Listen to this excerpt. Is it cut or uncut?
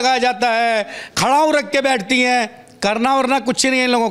uncut